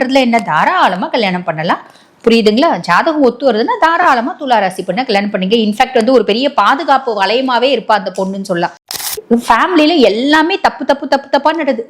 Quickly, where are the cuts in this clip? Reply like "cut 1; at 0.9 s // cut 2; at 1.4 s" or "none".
cut 1; at 8.9 s